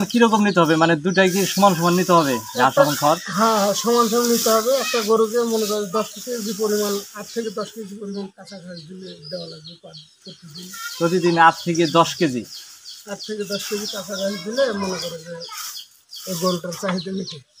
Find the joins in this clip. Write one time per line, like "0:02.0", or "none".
none